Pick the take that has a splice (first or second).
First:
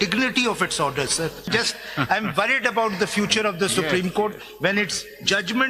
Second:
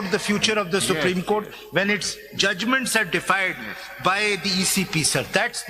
first